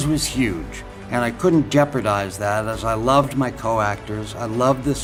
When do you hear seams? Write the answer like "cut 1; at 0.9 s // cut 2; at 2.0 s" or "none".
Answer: none